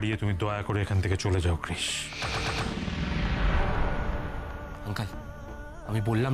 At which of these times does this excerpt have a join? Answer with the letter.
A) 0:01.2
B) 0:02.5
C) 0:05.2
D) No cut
D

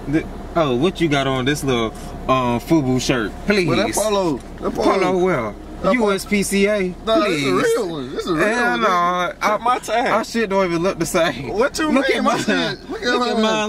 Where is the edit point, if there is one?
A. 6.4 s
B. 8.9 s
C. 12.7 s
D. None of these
D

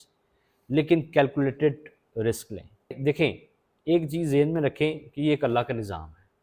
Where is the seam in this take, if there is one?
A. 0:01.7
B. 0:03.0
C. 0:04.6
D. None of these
B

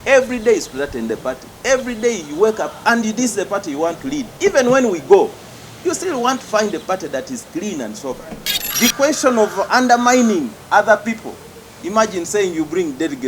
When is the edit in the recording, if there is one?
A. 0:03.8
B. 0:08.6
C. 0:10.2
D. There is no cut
B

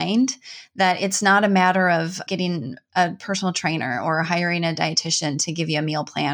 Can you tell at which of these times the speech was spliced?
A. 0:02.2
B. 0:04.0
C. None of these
A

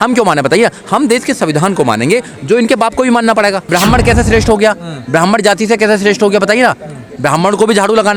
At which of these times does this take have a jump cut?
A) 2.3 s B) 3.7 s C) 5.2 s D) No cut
B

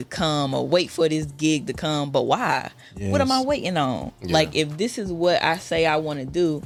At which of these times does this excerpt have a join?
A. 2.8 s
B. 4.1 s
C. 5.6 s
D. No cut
D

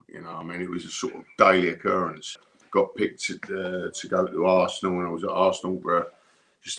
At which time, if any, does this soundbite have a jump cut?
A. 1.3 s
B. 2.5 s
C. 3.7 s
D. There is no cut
B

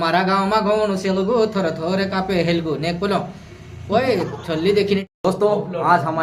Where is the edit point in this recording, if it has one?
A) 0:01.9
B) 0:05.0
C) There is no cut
B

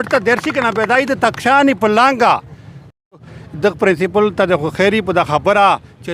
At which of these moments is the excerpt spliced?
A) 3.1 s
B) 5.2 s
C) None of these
A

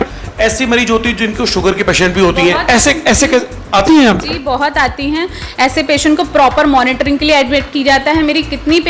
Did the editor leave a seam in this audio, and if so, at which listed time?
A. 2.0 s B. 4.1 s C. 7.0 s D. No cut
D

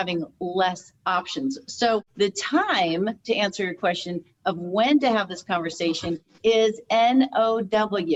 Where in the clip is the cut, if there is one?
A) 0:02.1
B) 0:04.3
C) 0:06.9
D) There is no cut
D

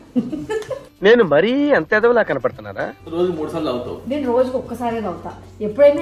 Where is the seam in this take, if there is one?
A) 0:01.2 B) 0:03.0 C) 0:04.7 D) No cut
B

